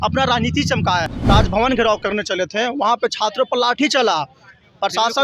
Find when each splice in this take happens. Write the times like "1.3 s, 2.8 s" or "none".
1.1 s

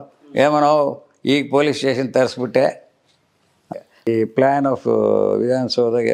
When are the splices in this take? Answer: 4.1 s

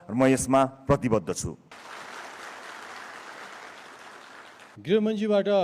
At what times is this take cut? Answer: 1.7 s, 4.7 s

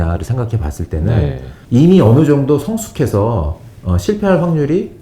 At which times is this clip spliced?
1.5 s

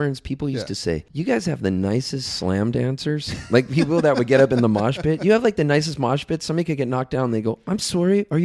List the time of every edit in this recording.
1.1 s

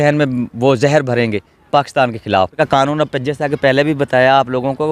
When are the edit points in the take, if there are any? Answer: 2.5 s

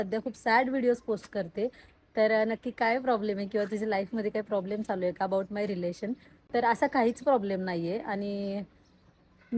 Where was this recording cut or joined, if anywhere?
none

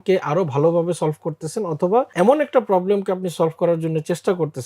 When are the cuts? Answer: 2.1 s

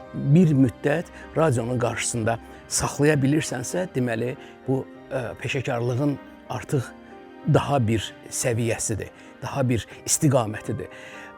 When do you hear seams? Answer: none

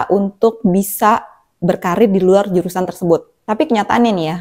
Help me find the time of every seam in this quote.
3.3 s

